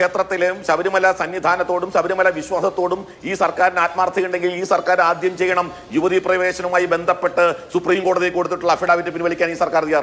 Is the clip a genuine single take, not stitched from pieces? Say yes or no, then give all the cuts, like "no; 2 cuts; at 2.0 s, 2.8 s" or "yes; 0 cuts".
yes; 0 cuts